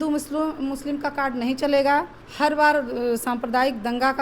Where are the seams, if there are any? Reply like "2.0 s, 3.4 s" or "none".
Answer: 2.2 s